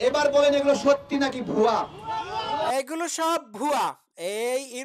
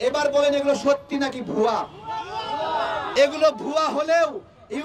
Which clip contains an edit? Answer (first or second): second